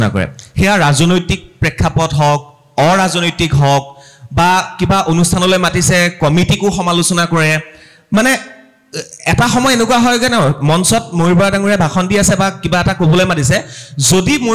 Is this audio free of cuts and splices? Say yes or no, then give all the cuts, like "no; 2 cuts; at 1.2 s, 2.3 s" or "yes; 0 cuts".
yes; 0 cuts